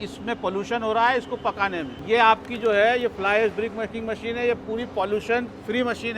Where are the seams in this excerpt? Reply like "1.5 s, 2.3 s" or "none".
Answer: 1.9 s